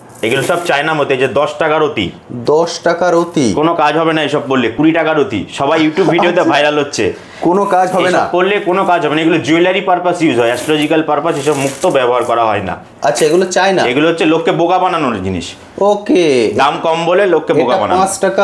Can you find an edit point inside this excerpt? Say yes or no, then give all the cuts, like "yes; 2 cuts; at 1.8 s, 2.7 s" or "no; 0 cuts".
no; 0 cuts